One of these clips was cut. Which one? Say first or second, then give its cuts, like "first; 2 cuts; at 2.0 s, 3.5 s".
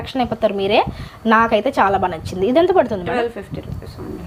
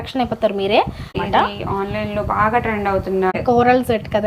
second; 2 cuts; at 1.1 s, 3.4 s